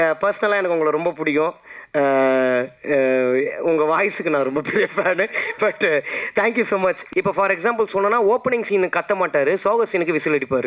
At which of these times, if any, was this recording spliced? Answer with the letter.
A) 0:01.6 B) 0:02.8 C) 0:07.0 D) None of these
C